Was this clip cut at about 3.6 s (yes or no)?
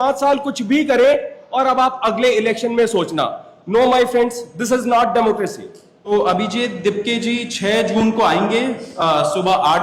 no